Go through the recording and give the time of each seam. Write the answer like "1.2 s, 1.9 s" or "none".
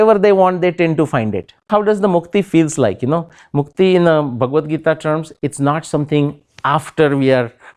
1.7 s